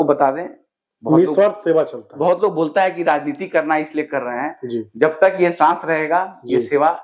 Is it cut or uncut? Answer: uncut